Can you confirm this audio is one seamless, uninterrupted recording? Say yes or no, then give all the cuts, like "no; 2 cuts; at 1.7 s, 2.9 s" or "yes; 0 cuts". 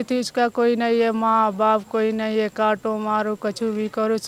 yes; 0 cuts